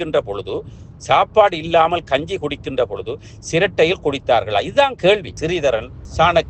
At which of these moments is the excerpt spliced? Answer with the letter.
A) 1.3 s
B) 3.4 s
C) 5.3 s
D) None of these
C